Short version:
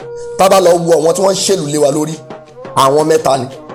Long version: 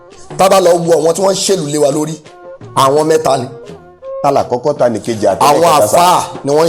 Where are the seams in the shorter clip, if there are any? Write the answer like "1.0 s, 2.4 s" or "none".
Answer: none